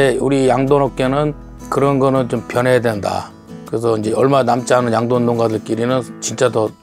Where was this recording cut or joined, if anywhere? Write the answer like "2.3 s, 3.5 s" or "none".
none